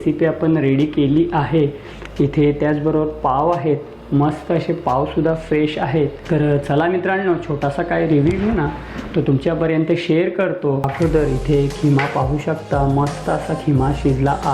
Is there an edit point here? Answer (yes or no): yes